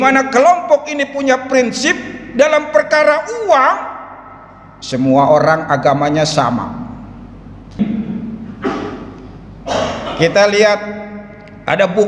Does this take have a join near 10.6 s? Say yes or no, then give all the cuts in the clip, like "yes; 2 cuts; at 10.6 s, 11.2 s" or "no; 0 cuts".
no; 1 cut; at 7.8 s